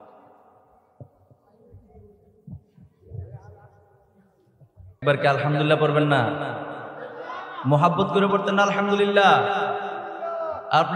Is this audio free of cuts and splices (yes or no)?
no